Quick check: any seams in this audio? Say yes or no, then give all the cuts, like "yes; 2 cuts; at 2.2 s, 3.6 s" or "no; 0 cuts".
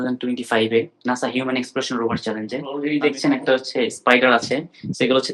yes; 1 cut; at 2.9 s